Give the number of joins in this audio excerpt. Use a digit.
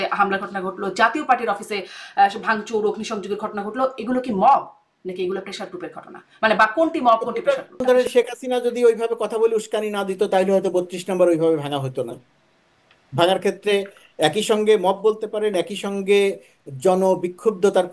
1